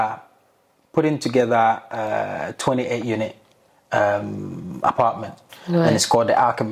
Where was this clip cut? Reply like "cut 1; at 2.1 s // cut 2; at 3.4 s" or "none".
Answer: none

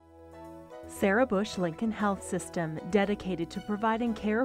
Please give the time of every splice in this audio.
cut 1; at 1.0 s

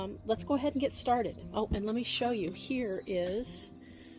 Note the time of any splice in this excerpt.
none

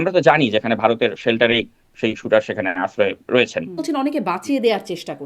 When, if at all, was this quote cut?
cut 1; at 3.8 s

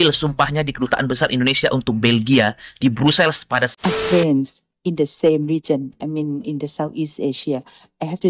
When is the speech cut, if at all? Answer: cut 1; at 3.7 s

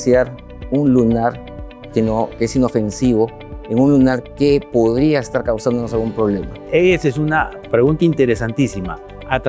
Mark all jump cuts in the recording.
cut 1; at 6.5 s

